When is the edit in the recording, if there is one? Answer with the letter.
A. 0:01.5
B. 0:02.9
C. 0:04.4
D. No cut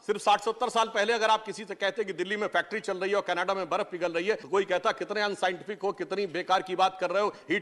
C